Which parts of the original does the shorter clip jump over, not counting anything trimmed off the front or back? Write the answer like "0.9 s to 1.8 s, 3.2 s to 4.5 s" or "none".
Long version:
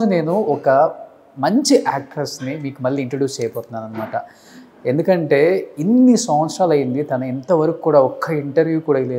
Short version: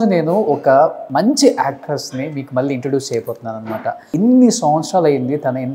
1.0 s to 1.3 s, 4.3 s to 5.7 s